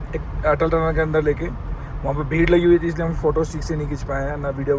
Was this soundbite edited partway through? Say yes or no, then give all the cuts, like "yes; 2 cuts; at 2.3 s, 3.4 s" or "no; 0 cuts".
no; 0 cuts